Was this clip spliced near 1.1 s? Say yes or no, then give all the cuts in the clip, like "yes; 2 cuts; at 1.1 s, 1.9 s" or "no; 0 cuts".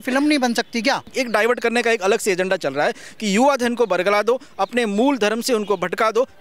yes; 1 cut; at 1.1 s